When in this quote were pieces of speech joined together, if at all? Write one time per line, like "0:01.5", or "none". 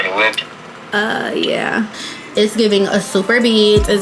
0:01.9